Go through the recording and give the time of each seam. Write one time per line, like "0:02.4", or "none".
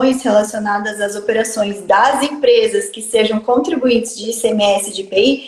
none

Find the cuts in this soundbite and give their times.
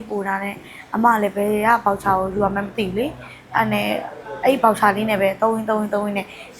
none

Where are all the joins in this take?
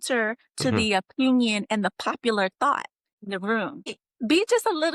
0:03.1
0:04.0

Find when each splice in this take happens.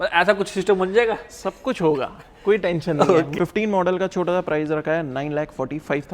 0:03.3

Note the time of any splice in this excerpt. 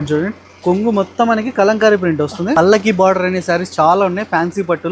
0:02.5

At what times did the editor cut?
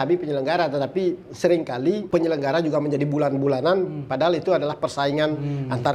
0:02.0

